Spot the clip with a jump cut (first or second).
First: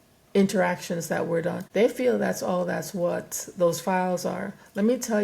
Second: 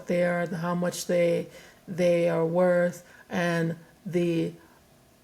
first